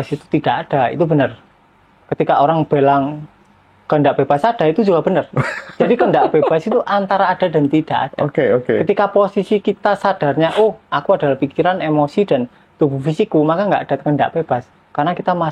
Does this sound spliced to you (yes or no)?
no